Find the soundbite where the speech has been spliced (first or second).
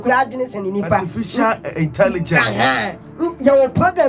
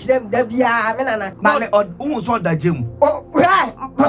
second